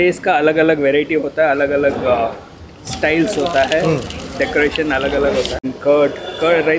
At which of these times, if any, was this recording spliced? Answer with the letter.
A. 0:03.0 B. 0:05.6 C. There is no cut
B